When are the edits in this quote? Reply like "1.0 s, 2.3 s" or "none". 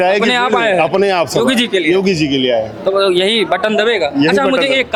none